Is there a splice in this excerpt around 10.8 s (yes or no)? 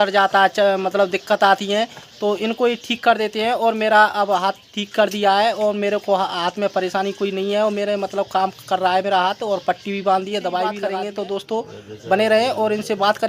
yes